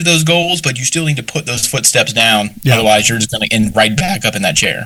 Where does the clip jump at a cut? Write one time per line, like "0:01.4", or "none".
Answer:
none